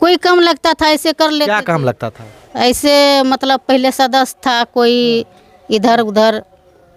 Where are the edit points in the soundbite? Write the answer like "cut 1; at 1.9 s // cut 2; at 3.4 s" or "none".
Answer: none